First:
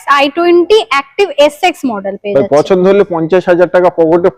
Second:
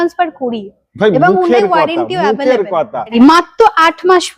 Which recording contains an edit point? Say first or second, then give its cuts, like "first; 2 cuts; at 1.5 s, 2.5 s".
second; 1 cut; at 3.1 s